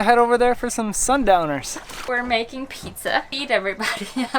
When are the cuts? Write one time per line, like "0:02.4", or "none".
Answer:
0:02.1
0:03.3

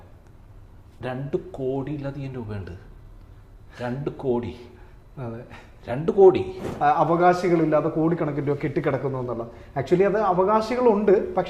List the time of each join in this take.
0:06.7

